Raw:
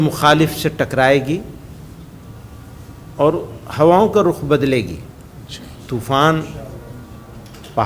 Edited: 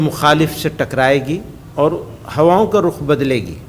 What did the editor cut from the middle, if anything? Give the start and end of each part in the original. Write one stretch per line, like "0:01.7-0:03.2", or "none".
0:01.6-0:03.0